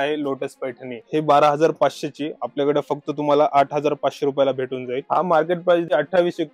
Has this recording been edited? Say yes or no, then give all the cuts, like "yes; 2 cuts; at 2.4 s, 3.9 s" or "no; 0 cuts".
yes; 2 cuts; at 0.9 s, 5.0 s